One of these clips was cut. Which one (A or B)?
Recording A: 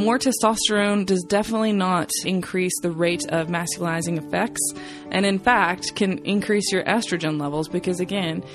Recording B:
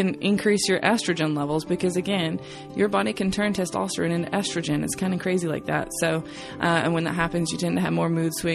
A